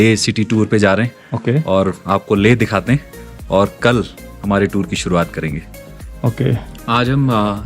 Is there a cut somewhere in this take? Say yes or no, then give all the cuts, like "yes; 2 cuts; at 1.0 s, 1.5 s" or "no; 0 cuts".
no; 0 cuts